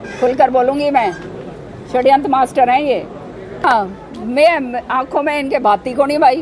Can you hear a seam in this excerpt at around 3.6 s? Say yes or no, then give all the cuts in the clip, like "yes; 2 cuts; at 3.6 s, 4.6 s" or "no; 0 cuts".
yes; 1 cut; at 3.6 s